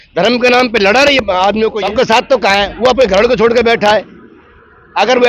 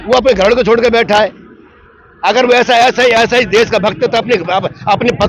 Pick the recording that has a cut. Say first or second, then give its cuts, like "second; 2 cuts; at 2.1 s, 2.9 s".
first; 1 cut; at 1.8 s